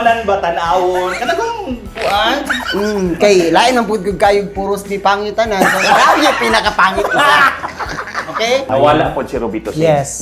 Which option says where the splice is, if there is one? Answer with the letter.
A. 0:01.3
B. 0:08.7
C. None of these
B